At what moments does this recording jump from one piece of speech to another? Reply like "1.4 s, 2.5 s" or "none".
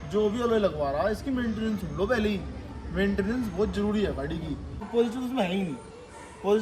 4.8 s